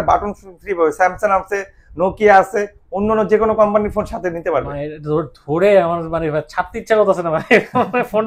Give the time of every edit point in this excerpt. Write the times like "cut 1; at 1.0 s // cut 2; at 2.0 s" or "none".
none